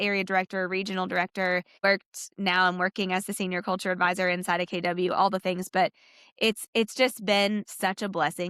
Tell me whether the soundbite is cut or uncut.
cut